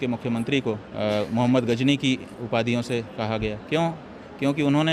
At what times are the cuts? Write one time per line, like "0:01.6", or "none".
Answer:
0:00.9
0:02.3
0:03.6